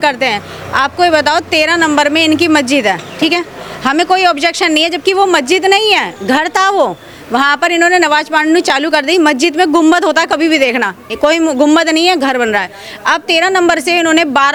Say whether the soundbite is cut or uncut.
uncut